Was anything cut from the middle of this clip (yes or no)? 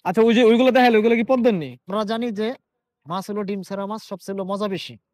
yes